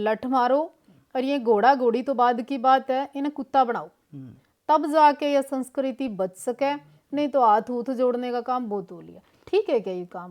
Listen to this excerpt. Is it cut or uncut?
uncut